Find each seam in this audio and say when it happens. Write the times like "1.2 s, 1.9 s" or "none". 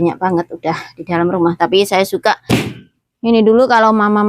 2.5 s